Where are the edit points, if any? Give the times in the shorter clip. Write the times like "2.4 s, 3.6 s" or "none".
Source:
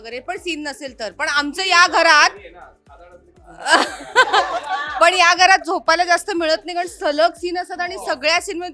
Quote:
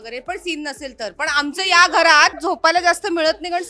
2.4 s